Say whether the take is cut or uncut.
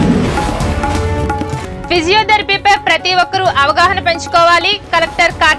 uncut